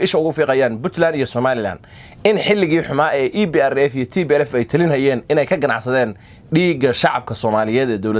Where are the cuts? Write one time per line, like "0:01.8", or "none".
none